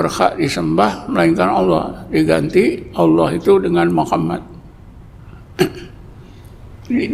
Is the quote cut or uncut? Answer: uncut